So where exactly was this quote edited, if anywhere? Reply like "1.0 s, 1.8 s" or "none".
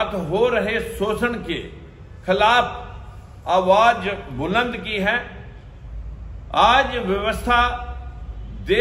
none